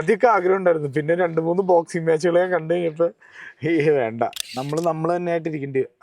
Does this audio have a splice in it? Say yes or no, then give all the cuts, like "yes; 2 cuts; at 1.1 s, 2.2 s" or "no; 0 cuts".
yes; 1 cut; at 4.4 s